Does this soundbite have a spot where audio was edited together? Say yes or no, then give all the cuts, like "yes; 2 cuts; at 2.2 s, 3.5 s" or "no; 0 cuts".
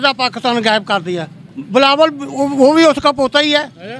yes; 1 cut; at 1.5 s